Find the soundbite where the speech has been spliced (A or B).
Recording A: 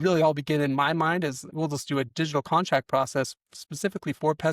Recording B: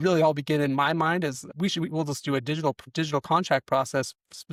A